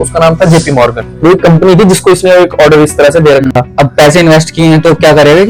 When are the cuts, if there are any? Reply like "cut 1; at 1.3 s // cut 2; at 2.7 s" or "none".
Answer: cut 1; at 1.0 s // cut 2; at 3.5 s